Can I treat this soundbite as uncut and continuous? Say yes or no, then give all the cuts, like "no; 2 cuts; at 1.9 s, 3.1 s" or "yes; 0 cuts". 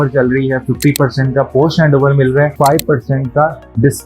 no; 1 cut; at 2.5 s